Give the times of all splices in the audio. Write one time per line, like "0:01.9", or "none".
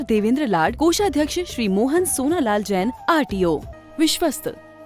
0:03.7